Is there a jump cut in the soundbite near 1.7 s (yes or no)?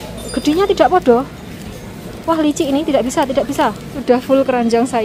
no